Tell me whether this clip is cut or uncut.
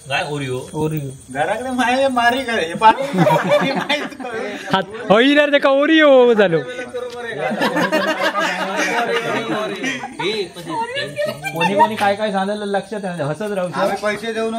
uncut